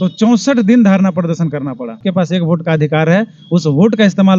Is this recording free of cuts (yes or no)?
no